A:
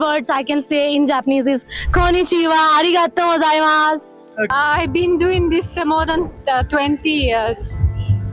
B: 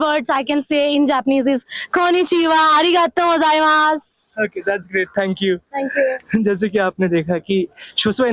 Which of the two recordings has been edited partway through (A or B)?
A